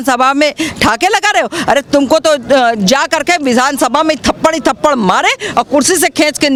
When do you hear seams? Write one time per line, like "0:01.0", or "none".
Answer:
none